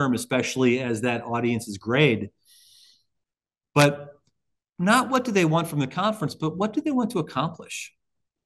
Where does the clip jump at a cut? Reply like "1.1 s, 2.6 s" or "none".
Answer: none